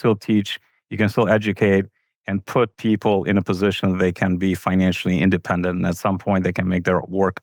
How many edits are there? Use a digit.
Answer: 0